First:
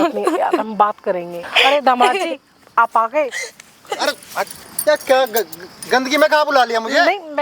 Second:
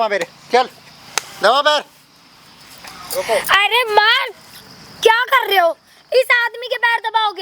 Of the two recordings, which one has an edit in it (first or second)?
first